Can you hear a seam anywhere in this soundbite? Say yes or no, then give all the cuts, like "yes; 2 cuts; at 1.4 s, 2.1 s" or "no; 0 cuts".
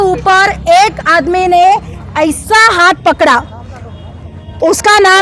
no; 0 cuts